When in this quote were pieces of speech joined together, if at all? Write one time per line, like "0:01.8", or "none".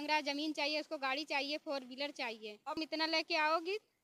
0:02.8